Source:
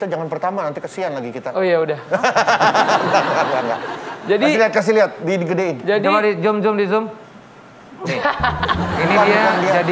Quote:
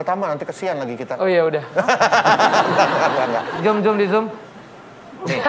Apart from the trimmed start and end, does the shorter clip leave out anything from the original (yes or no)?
yes